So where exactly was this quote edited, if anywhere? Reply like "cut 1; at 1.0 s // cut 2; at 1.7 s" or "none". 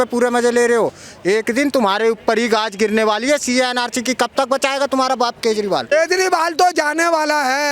cut 1; at 5.9 s